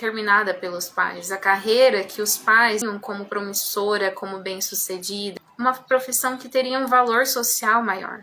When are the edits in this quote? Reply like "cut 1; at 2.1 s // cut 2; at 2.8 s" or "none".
cut 1; at 2.8 s